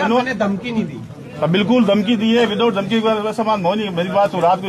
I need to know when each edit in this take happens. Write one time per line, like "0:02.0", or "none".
none